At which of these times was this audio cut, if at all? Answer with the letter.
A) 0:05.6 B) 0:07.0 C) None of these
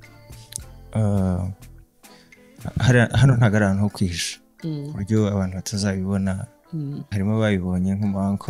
B